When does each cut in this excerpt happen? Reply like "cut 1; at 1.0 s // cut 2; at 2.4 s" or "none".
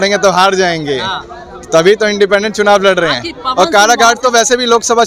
none